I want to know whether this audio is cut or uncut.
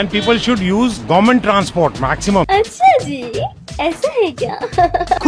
cut